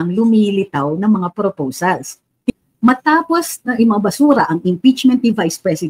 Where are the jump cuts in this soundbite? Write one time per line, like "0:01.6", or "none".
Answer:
0:02.5